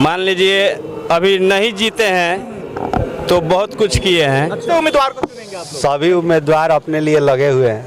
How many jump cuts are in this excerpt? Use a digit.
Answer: 1